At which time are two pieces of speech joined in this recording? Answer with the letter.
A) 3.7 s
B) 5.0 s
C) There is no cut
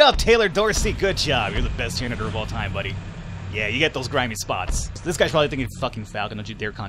B